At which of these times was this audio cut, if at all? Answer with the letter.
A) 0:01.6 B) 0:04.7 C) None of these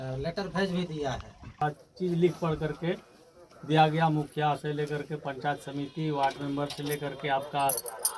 A